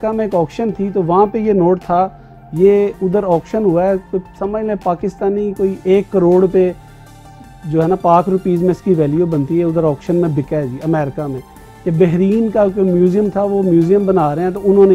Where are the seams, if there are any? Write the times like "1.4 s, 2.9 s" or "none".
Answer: none